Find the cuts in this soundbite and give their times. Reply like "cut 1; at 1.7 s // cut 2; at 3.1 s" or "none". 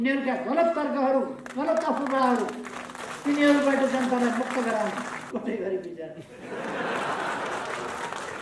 cut 1; at 5.2 s